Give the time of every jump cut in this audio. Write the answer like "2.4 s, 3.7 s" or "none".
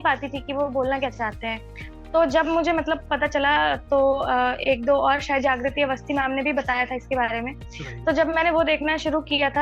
none